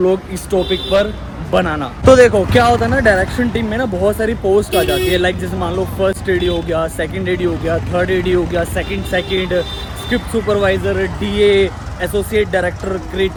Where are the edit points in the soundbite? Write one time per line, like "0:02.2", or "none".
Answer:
none